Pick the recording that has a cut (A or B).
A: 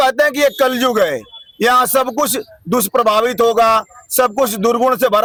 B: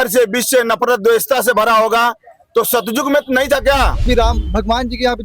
B